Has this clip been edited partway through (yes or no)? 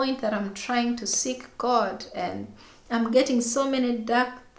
no